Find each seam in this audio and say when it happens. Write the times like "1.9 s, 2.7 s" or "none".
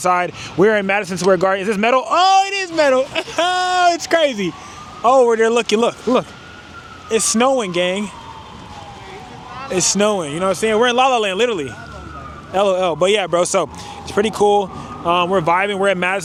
none